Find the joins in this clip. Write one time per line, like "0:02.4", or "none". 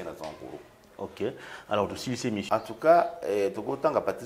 0:02.4